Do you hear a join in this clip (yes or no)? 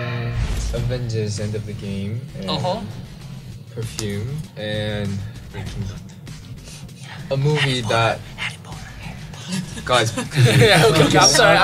yes